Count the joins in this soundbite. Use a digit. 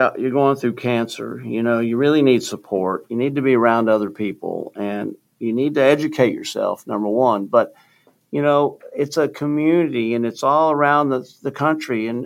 0